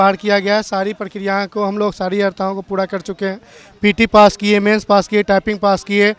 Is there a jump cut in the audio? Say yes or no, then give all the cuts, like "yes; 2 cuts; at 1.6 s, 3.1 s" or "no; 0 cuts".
no; 0 cuts